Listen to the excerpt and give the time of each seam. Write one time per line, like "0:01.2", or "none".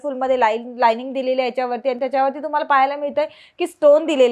none